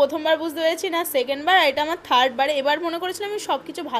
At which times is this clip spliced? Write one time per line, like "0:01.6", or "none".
none